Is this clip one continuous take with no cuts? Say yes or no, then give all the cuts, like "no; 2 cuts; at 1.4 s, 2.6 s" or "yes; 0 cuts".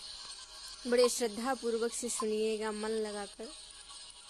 yes; 0 cuts